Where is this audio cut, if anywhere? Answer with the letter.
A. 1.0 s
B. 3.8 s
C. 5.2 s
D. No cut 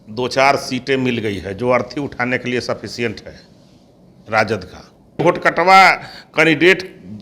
C